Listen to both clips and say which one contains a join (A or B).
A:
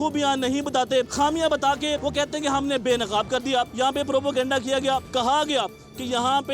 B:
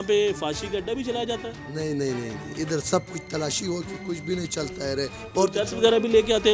A